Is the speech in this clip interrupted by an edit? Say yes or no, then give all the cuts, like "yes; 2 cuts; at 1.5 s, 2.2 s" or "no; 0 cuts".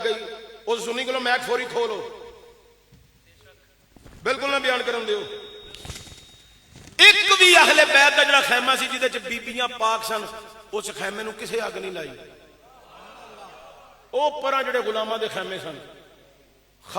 no; 0 cuts